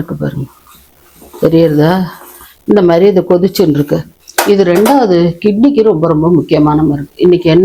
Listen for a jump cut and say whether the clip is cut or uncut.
uncut